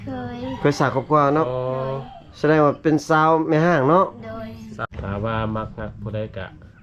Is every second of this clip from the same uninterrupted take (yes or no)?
no